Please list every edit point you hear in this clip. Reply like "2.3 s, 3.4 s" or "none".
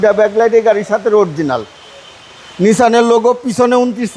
none